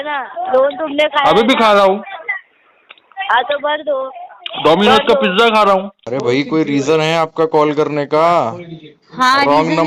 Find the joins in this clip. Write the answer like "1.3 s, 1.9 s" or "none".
6.0 s